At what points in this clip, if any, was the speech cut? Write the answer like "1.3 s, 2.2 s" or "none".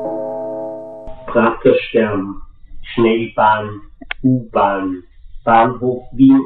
0.9 s

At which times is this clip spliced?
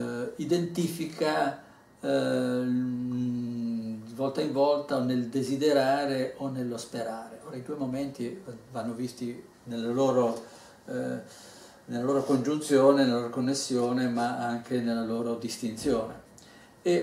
2.9 s

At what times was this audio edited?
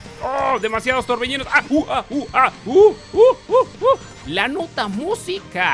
4.1 s

